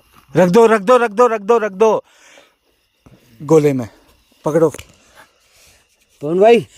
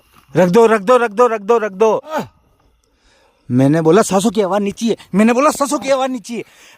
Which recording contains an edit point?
second; 1 cut; at 2.1 s

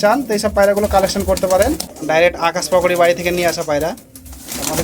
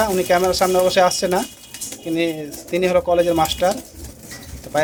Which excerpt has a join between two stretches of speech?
first; 1 cut; at 2.2 s

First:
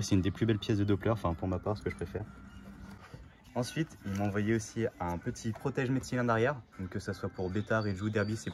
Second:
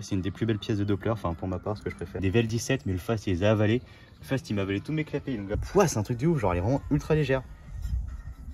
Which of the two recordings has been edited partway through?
second; 2 cuts; at 2.2 s, 5.6 s

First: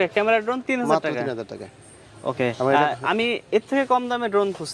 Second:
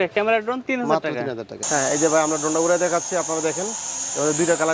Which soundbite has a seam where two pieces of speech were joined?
second; 1 cut; at 1.6 s

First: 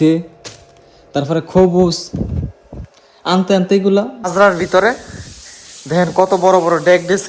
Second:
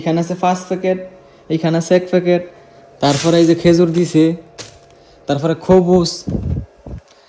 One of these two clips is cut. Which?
first; 1 cut; at 4.2 s

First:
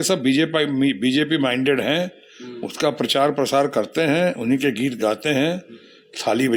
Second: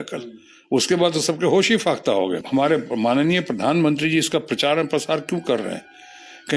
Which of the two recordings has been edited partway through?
second; 1 cut; at 2.4 s

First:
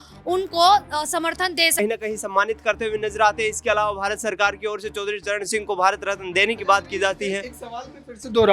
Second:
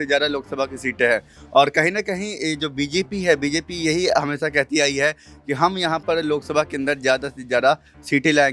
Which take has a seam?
first; 1 cut; at 1.8 s

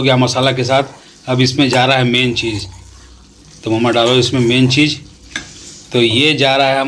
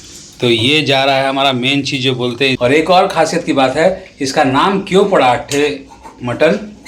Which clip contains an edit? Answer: second; 1 cut; at 2.6 s

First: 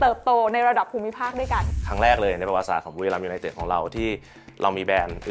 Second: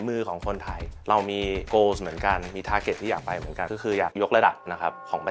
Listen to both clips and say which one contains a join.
first; 1 cut; at 1.7 s

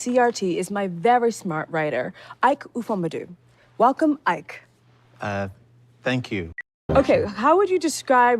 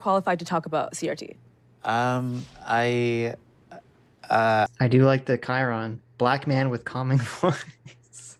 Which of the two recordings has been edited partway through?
first; 1 cut; at 6.7 s

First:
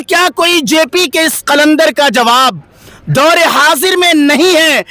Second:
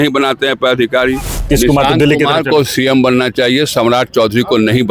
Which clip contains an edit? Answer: second; 1 cut; at 1.5 s

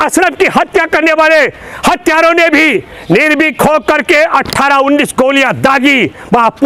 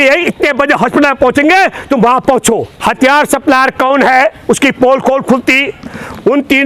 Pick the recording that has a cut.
second; 1 cut; at 2.7 s

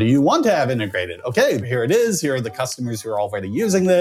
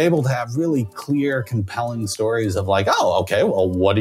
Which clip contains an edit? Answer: first; 1 cut; at 1.6 s

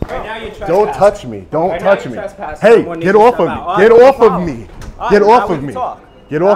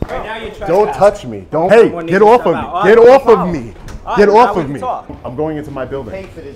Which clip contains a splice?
second; 2 cuts; at 1.7 s, 5.2 s

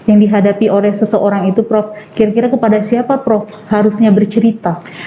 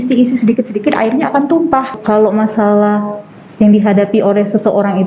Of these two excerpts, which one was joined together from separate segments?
second; 1 cut; at 2.0 s

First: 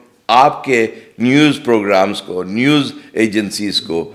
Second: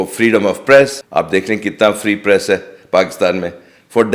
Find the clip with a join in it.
second; 1 cut; at 1.0 s

